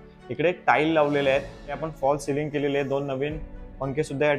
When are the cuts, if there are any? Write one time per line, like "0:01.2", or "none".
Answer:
0:01.8